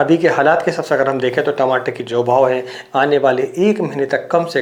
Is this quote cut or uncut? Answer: uncut